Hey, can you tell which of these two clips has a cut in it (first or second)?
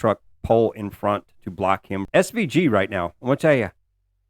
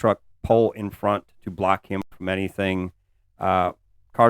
first